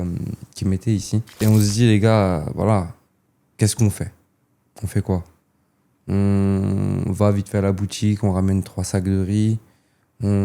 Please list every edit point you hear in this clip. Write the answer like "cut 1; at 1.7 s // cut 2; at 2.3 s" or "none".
cut 1; at 1.4 s